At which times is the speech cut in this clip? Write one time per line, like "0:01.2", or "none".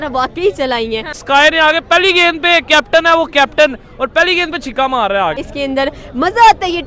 0:01.2
0:05.4